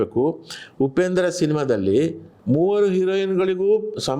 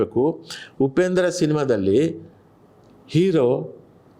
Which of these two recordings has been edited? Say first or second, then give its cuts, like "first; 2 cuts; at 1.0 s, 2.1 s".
first; 1 cut; at 2.3 s